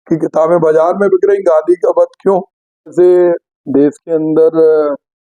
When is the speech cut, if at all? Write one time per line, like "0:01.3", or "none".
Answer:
0:02.9